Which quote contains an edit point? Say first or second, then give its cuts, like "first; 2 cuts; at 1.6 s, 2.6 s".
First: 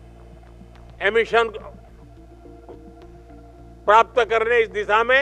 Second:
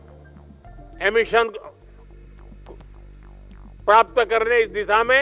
first; 2 cuts; at 1.7 s, 3.8 s